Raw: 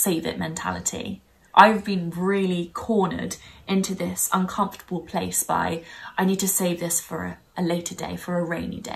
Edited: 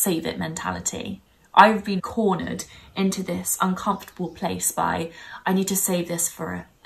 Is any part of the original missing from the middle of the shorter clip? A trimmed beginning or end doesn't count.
yes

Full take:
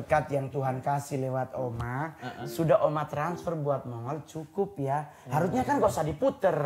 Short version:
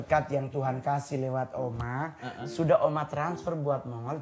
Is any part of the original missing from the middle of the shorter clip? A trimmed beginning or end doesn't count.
no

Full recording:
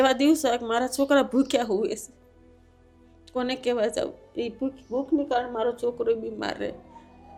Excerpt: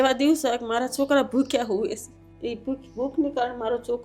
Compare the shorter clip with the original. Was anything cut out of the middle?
yes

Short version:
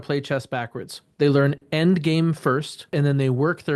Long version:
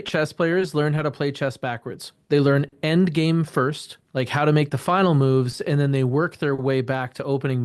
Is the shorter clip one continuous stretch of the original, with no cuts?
no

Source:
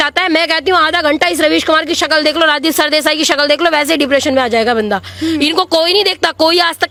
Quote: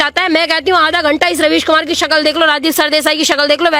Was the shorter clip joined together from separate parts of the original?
no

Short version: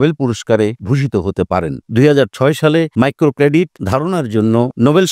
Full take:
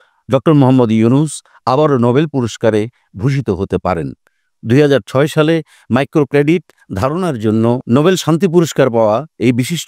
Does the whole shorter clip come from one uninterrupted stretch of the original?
no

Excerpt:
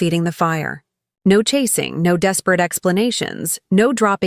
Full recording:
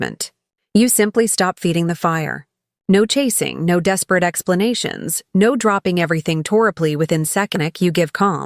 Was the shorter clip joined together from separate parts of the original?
no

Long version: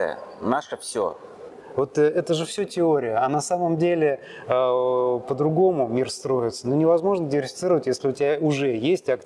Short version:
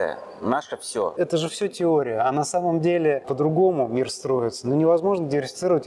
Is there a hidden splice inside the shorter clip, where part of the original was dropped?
yes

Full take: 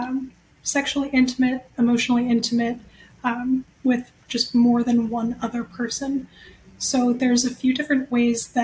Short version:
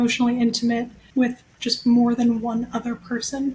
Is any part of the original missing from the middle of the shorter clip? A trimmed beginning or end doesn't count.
yes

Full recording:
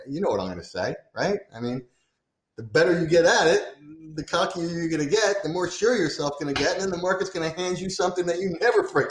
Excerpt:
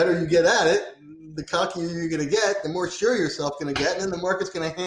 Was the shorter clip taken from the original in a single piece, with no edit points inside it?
yes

